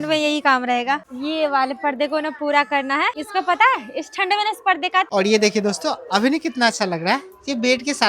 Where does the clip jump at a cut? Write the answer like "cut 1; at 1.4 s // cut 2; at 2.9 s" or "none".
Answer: cut 1; at 1.1 s // cut 2; at 3.1 s // cut 3; at 5.1 s